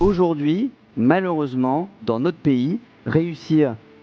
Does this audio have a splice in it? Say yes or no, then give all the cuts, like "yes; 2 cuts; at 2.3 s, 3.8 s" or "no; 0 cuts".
no; 0 cuts